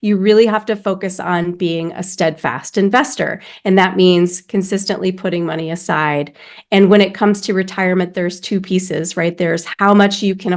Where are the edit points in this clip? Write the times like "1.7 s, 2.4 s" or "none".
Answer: none